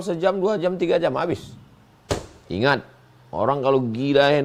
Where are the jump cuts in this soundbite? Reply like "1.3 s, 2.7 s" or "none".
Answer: none